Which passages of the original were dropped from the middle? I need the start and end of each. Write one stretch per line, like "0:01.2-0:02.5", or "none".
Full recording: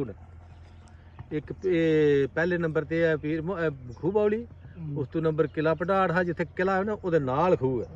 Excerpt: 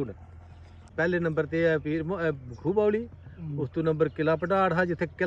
0:00.9-0:02.3